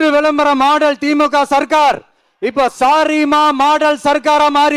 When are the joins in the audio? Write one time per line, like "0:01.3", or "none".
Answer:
none